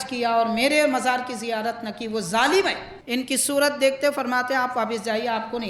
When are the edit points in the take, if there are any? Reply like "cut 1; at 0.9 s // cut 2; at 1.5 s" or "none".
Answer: cut 1; at 2.9 s